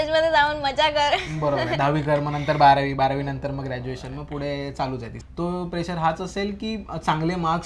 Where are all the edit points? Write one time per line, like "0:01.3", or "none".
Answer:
0:05.2